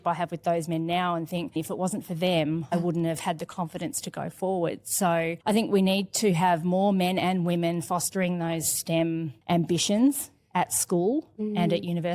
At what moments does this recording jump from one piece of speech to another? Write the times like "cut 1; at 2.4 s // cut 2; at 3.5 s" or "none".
cut 1; at 1.5 s // cut 2; at 2.7 s // cut 3; at 5.4 s